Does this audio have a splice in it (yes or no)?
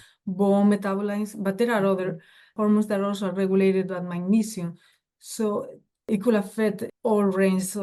no